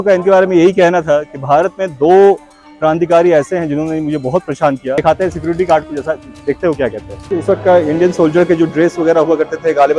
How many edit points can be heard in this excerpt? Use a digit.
2